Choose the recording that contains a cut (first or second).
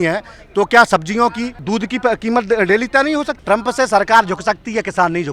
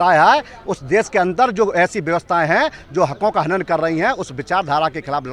first